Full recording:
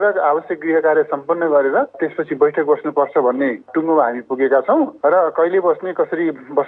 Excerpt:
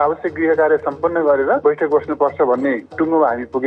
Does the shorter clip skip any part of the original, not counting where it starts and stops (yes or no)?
yes